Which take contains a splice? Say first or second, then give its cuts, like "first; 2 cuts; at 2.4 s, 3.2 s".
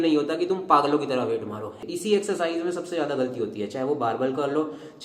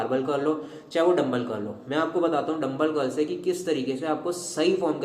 first; 1 cut; at 1.7 s